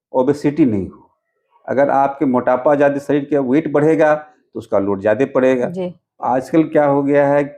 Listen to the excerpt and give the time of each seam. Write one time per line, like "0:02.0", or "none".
0:06.2